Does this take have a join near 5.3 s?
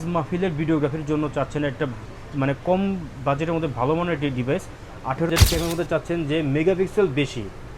yes; 1 cut; at 5.3 s

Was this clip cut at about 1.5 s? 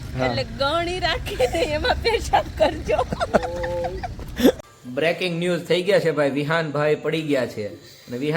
no; 1 cut; at 4.6 s

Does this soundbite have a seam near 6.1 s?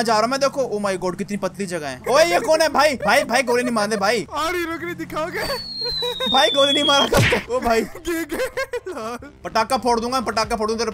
no; 3 cuts; at 2.0 s, 4.2 s, 9.3 s

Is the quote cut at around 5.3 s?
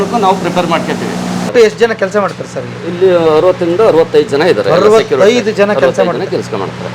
no; 1 cut; at 1.5 s

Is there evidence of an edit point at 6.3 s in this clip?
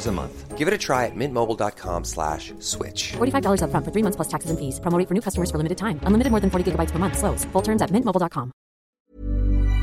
no; 1 cut; at 8.9 s

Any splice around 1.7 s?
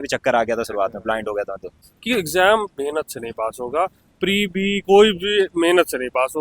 yes; 1 cut; at 1.7 s

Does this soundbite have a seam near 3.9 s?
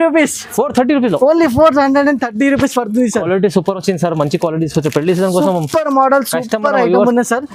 no; 0 cuts

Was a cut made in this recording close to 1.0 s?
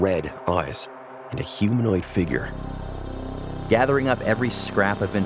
no; 1 cut; at 3.1 s

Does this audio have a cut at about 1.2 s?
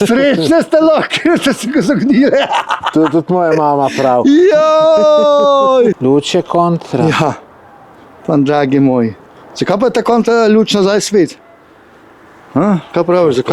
no; 1 cut; at 6.0 s

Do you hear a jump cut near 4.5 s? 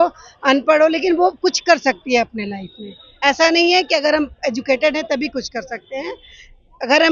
no; 0 cuts

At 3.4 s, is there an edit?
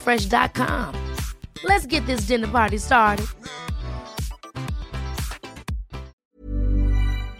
no; 1 cut; at 6.2 s

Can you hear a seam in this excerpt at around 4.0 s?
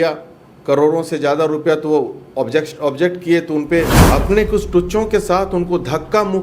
yes; 1 cut; at 4.0 s

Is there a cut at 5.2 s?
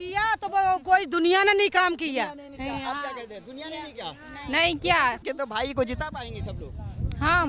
yes; 1 cut; at 5.2 s

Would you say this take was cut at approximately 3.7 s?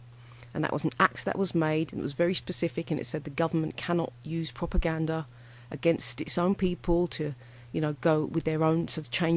yes; 1 cut; at 3.7 s

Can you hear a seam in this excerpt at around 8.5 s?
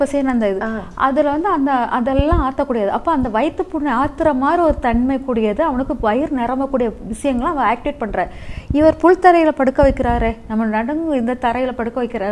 no; 0 cuts

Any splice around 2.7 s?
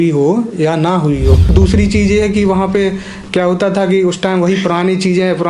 no; 1 cut; at 1.5 s

